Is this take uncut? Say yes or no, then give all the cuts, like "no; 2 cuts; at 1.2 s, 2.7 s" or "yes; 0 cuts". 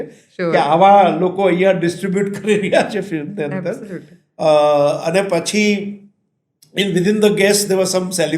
yes; 0 cuts